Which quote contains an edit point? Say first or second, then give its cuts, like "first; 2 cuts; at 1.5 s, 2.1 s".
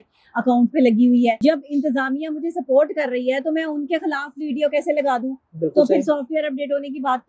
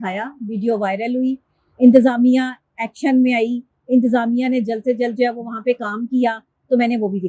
first; 1 cut; at 1.4 s